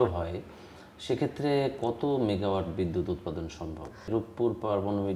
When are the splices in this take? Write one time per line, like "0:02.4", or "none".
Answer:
0:04.1